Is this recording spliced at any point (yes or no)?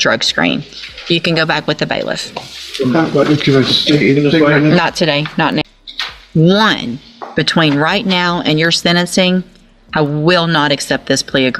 yes